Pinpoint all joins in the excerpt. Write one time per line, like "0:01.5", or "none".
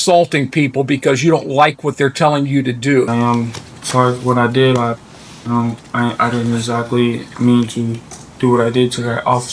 0:03.1

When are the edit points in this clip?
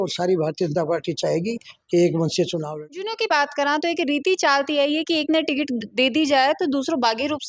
0:03.1

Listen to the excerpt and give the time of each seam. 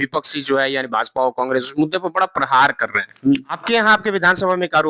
0:03.5

